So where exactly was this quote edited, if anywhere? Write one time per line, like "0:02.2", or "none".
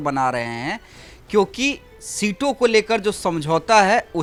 none